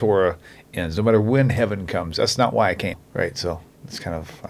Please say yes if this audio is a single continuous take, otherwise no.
yes